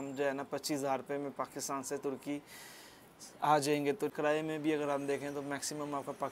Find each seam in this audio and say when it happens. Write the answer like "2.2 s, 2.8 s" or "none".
4.1 s